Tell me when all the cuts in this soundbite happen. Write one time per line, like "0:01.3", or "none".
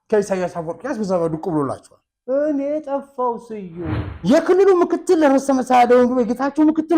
0:04.1